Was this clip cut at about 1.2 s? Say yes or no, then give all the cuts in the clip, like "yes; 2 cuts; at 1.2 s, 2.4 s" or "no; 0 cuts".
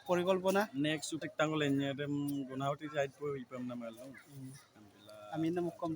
yes; 1 cut; at 1.2 s